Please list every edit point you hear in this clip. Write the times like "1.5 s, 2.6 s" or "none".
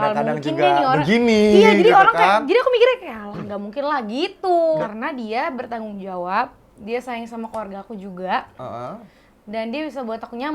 4.8 s